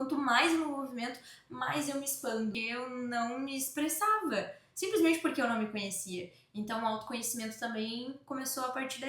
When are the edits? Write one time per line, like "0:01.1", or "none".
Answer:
0:02.5